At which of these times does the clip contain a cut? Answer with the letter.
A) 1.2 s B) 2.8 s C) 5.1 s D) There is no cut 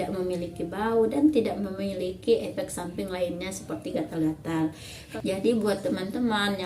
C